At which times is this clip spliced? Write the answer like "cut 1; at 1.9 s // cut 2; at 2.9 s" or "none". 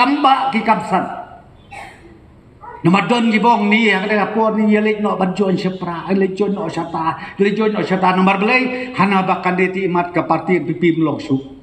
none